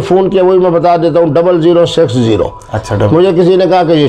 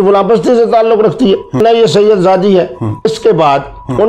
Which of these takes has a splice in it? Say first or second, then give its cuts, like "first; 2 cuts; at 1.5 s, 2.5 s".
second; 2 cuts; at 1.6 s, 3.1 s